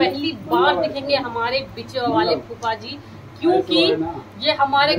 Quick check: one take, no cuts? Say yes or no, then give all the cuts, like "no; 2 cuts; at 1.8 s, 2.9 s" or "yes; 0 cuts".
yes; 0 cuts